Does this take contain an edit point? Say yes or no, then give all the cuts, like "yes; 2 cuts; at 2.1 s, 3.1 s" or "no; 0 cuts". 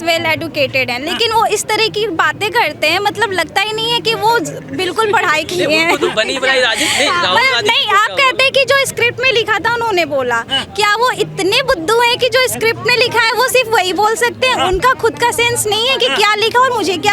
no; 0 cuts